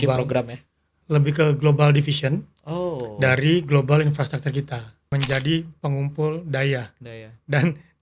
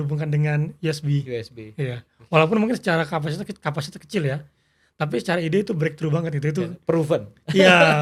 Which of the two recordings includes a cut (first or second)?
first